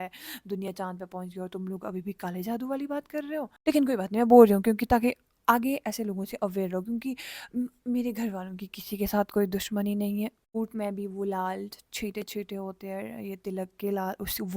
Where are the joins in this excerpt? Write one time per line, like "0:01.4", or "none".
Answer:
0:03.5
0:10.4